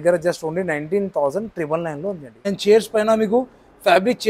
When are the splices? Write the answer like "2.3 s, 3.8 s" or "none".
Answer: 2.5 s